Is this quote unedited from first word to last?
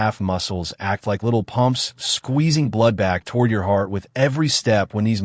yes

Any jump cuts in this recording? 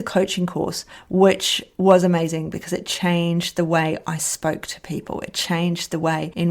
no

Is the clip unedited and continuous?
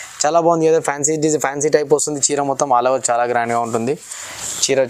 yes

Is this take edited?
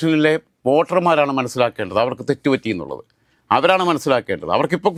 no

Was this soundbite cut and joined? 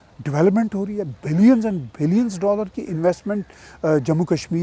no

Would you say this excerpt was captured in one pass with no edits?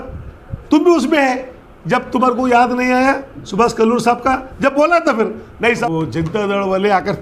no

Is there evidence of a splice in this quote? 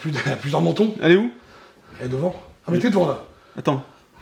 no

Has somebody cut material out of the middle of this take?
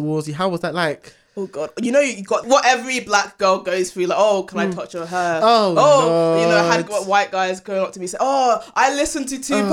yes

